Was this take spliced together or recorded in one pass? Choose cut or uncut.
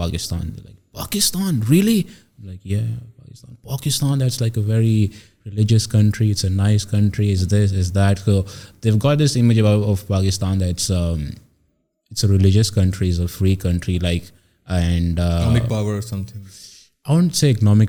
uncut